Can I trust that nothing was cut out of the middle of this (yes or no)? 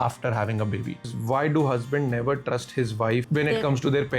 no